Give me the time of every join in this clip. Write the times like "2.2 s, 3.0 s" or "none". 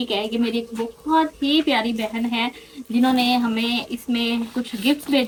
none